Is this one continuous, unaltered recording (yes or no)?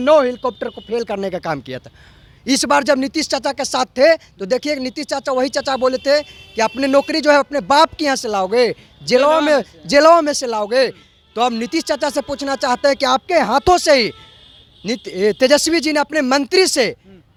yes